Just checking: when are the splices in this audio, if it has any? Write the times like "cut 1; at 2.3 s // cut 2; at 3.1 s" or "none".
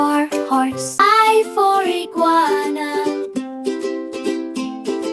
cut 1; at 0.9 s